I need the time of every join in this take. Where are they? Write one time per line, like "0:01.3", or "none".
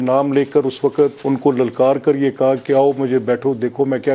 0:01.2